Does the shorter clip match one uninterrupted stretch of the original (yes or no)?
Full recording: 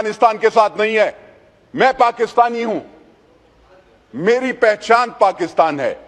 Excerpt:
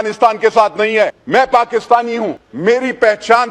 no